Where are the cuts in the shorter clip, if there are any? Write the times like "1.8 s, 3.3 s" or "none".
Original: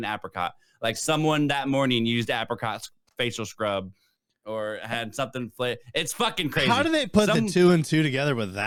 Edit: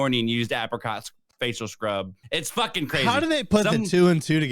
2.2 s